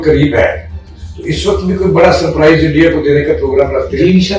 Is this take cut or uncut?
uncut